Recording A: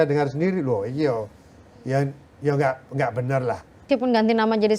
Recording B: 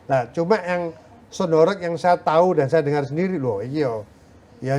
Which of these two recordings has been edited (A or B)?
A